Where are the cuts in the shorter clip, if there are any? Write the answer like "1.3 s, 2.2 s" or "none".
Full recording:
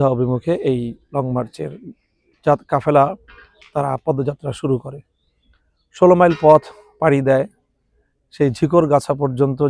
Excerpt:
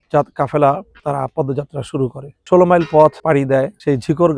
0.9 s, 2.3 s, 3.3 s